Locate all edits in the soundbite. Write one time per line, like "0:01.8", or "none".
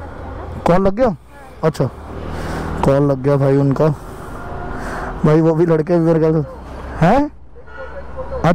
none